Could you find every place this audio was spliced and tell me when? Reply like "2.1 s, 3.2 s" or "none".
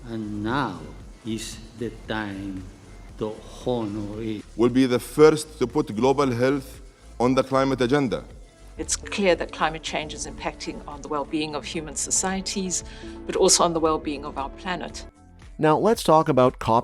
none